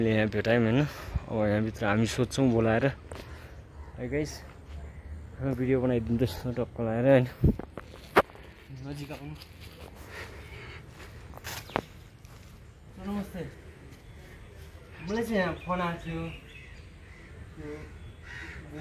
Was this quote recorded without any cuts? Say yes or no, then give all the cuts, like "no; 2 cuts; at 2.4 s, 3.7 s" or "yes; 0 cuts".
yes; 0 cuts